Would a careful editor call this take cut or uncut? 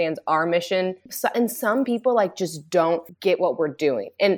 cut